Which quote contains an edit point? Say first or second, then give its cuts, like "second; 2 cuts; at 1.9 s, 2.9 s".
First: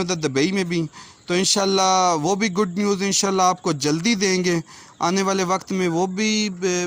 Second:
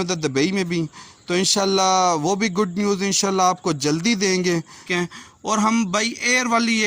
second; 1 cut; at 4.8 s